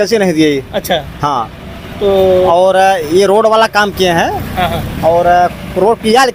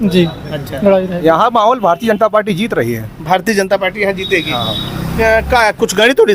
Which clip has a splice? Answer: second; 1 cut; at 1.1 s

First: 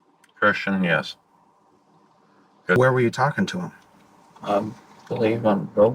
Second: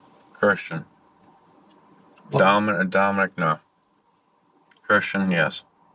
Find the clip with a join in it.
first; 1 cut; at 2.8 s

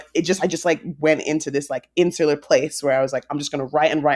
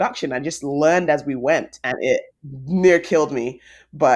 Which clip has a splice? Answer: second; 1 cut; at 1.7 s

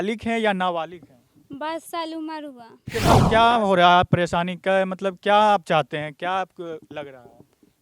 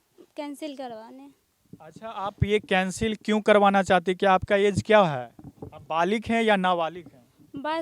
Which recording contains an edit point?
first; 1 cut; at 2.7 s

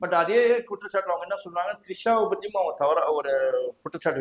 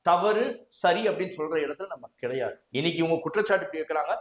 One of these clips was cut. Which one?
second; 1 cut; at 2.6 s

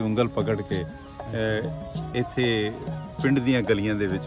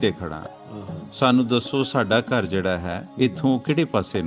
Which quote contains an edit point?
second; 1 cut; at 3.0 s

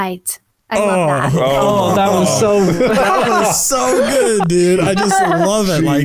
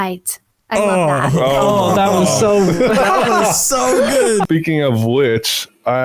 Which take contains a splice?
second; 1 cut; at 4.5 s

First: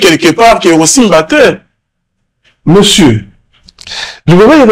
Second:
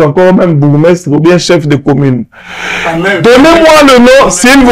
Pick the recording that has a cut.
second; 1 cut; at 2.3 s

